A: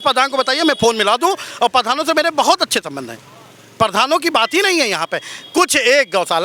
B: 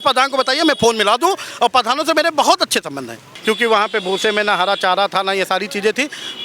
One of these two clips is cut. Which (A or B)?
B